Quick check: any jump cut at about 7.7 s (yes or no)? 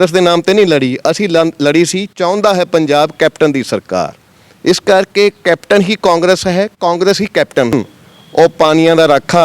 yes